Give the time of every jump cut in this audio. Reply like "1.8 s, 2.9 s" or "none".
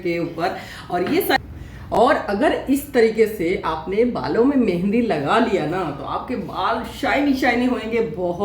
1.4 s